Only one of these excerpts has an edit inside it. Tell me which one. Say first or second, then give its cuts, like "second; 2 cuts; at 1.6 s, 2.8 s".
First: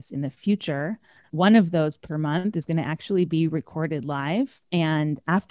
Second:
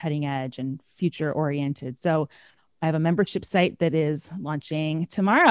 first; 2 cuts; at 1.2 s, 4.6 s